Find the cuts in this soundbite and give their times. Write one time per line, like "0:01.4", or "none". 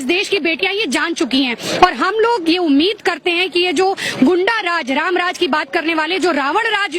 none